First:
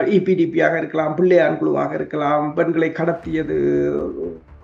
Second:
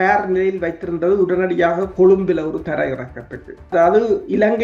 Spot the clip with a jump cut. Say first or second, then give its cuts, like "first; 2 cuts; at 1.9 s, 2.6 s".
second; 1 cut; at 3.6 s